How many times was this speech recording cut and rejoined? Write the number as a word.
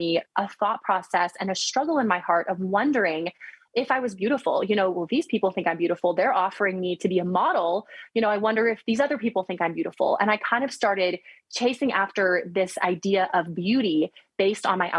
zero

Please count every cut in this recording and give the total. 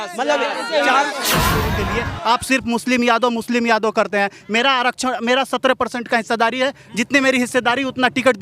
one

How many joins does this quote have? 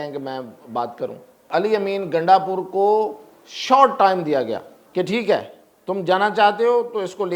two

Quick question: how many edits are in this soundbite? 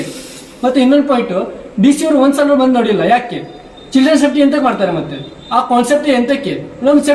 zero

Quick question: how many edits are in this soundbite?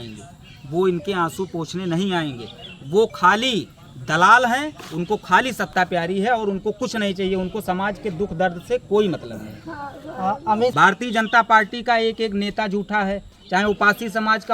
one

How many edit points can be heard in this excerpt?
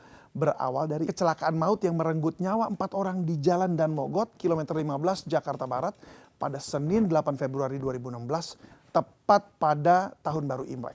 one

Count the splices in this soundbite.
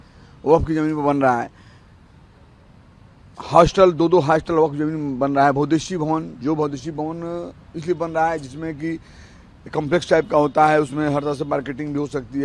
zero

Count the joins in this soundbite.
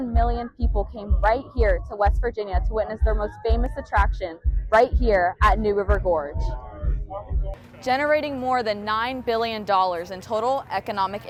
zero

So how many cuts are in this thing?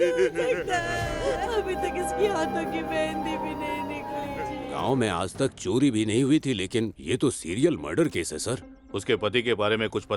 one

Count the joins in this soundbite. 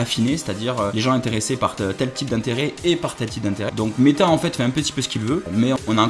one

